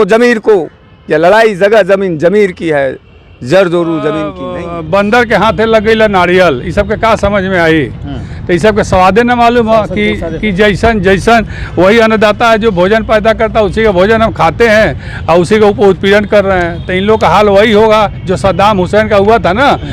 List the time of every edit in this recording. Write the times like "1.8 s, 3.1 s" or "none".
4.4 s